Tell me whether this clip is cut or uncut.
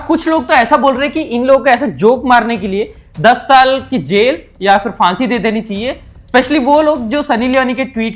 uncut